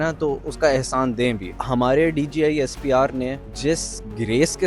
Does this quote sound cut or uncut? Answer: cut